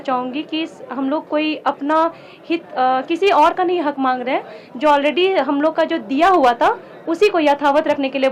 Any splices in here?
no; 0 cuts

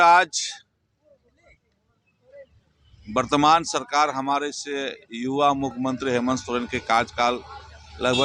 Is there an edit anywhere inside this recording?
no; 0 cuts

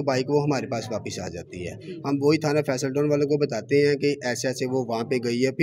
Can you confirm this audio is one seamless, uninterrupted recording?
yes; 0 cuts

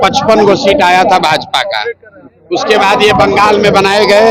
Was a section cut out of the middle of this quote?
no; 0 cuts

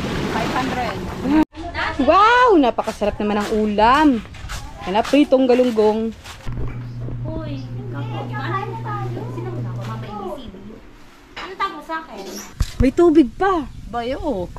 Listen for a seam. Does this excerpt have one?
yes; 3 cuts; at 1.4 s, 6.4 s, 12.5 s

